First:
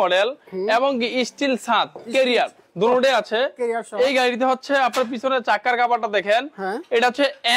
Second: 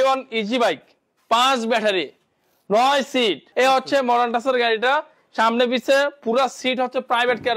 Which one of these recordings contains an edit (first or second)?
second